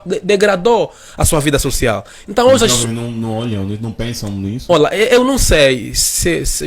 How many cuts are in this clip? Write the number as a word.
zero